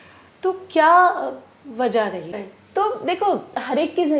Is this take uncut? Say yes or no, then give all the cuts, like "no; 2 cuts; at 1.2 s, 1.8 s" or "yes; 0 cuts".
no; 1 cut; at 2.4 s